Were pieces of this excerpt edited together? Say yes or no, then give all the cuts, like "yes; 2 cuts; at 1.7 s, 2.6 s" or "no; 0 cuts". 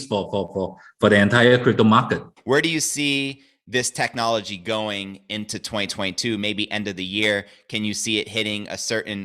yes; 1 cut; at 2.3 s